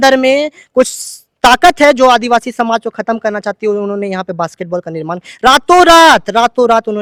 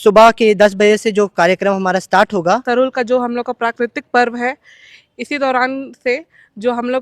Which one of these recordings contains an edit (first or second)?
second